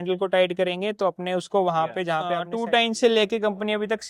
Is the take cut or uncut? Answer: cut